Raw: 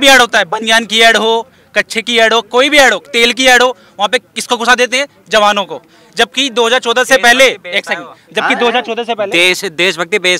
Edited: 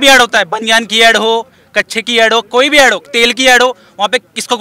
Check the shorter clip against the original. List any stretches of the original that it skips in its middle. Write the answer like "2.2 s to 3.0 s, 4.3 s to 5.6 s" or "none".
none